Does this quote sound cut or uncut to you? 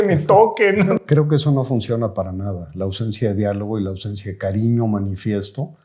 cut